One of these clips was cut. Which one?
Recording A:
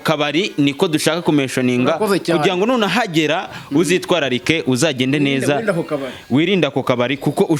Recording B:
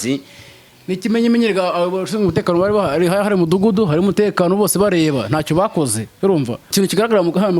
B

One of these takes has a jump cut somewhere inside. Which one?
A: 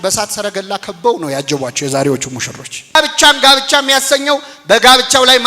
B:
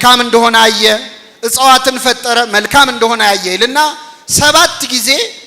A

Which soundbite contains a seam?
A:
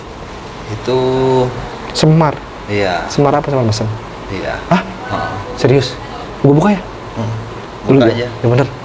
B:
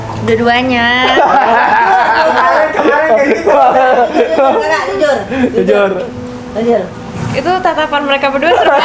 A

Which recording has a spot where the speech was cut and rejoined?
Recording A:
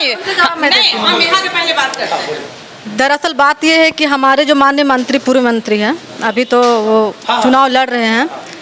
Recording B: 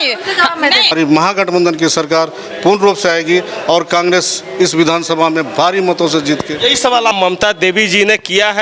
B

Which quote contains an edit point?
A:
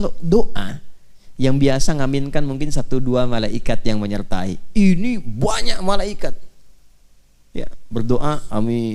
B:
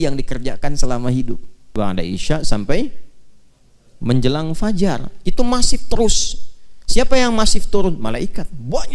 B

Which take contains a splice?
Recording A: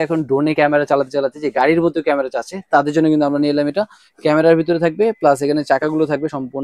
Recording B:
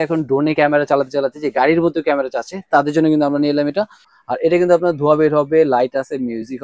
B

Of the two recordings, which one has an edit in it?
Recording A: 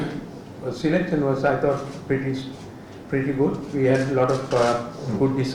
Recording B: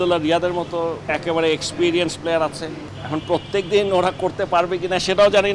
B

